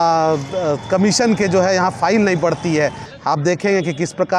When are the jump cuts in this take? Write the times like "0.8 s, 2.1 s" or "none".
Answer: 3.0 s